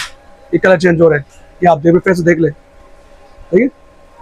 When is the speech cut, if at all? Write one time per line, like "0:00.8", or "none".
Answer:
none